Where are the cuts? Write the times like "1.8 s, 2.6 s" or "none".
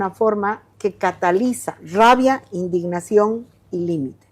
1.8 s